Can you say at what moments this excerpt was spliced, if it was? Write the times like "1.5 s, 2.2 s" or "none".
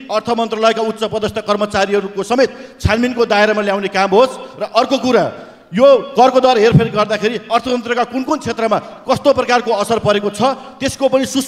none